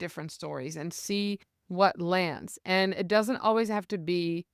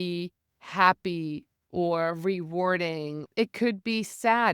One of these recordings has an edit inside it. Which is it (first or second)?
second